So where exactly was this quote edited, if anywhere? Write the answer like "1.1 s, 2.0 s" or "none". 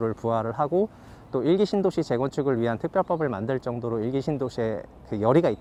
none